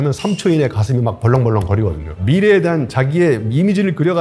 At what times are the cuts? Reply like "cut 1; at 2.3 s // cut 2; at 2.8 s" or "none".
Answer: cut 1; at 2.1 s